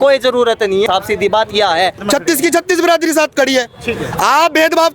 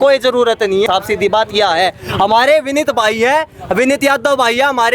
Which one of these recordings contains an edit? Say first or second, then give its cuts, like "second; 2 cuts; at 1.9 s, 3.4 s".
first; 1 cut; at 2.0 s